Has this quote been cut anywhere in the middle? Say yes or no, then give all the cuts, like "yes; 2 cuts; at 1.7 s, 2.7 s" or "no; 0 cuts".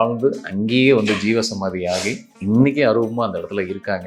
no; 0 cuts